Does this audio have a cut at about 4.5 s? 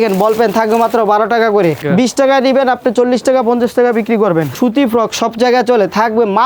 yes; 2 cuts; at 1.8 s, 4.5 s

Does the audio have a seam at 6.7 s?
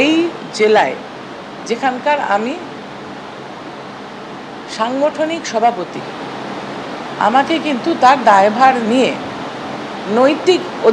no; 0 cuts

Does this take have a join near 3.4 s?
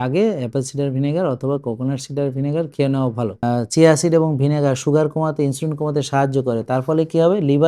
yes; 1 cut; at 3.4 s

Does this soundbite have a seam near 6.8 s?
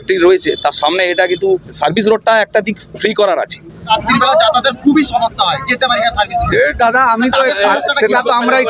no; 1 cut; at 3.9 s

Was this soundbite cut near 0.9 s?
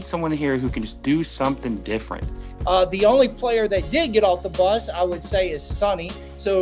no; 1 cut; at 2.5 s

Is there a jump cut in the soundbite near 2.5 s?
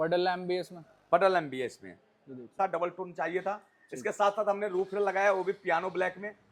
yes; 1 cut; at 2.5 s

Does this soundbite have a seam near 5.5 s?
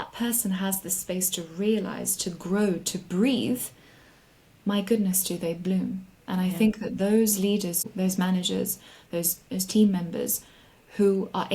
no; 1 cut; at 7.8 s

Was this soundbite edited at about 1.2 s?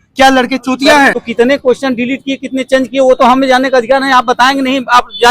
yes; 1 cut; at 1.2 s

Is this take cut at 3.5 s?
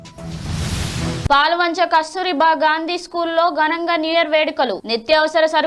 no; 1 cut; at 1.3 s

